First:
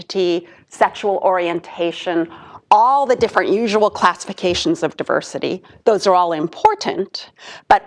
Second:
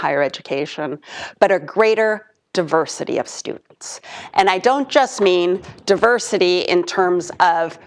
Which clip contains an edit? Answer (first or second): second